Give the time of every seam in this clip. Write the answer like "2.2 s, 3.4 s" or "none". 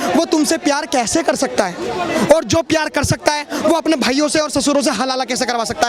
none